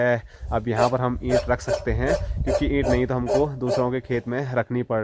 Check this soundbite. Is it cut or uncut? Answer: uncut